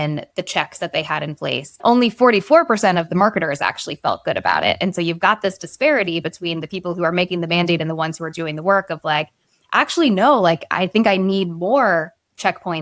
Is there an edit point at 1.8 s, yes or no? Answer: yes